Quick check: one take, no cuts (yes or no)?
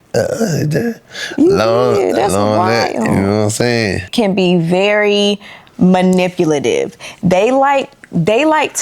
no